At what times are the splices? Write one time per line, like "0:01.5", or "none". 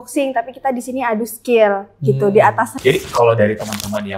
0:02.7